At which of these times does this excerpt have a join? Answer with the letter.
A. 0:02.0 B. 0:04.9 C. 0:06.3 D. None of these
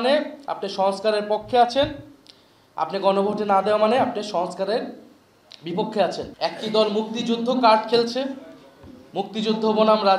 C